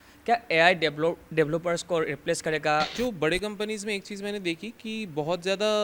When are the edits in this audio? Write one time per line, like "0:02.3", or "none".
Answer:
0:02.9